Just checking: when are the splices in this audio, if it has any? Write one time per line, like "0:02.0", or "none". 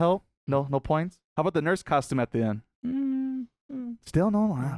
0:01.2